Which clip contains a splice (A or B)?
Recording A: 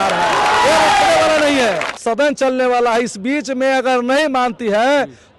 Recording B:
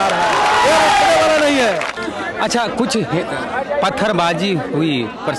A